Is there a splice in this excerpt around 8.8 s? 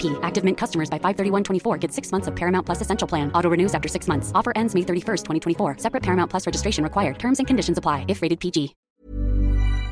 yes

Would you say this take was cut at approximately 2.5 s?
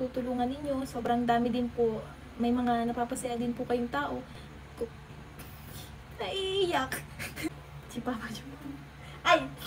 no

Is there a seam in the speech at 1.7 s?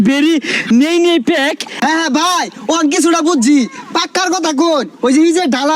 yes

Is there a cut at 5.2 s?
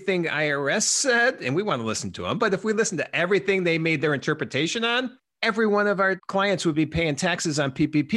yes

